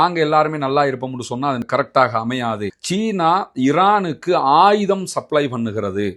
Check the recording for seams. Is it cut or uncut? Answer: cut